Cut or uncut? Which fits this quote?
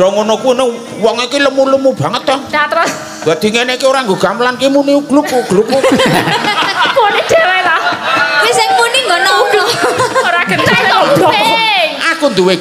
cut